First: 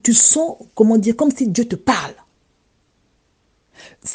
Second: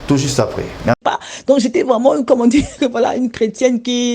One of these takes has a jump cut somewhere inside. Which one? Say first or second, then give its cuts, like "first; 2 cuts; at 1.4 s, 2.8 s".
second; 1 cut; at 1.0 s